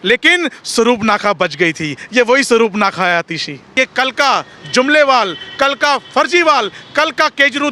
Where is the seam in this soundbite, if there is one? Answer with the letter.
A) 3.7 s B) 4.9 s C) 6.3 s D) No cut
A